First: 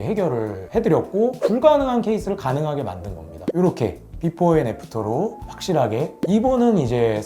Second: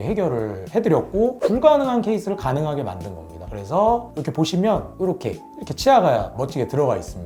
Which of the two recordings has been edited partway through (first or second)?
first